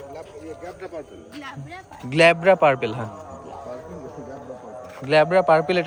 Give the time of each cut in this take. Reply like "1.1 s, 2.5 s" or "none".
none